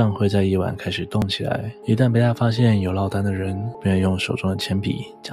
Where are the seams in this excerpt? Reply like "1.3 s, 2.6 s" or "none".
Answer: 1.7 s, 3.7 s